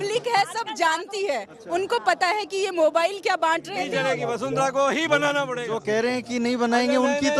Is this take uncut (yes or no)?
no